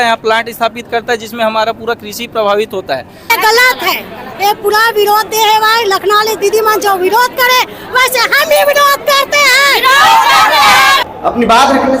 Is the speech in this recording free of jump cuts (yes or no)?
no